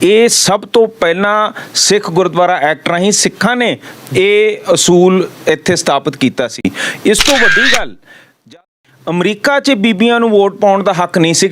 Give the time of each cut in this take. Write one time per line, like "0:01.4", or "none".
0:08.7